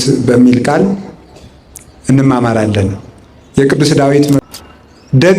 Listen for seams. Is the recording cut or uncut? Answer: cut